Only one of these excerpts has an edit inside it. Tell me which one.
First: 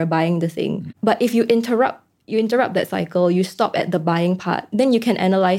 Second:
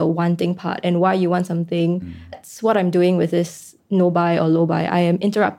second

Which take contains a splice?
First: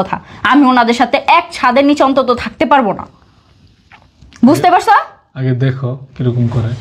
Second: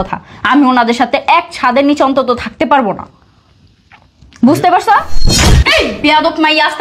second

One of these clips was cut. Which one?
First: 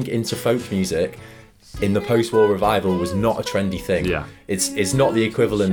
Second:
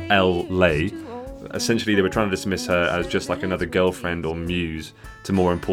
second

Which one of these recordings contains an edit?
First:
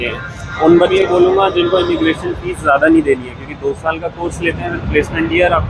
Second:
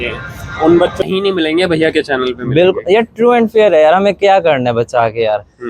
second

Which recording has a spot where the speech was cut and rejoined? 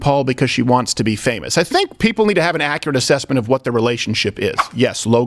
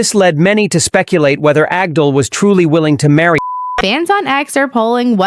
second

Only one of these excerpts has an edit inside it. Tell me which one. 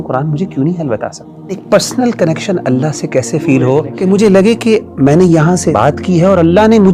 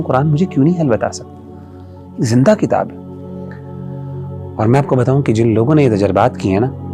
first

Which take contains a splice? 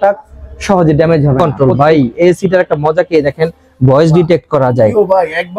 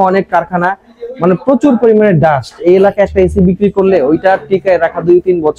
first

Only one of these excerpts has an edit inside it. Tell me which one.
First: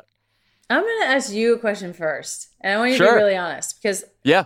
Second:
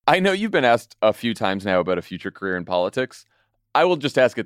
second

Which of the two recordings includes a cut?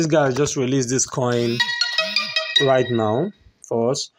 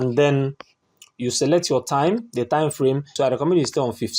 second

